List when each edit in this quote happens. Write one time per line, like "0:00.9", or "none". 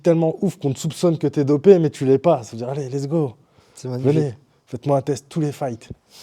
none